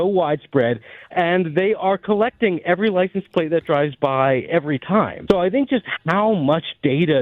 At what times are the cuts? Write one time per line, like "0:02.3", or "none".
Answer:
0:01.0
0:05.2